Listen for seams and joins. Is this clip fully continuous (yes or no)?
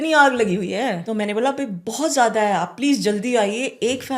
no